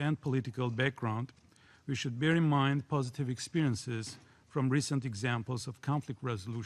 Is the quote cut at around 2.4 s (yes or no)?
yes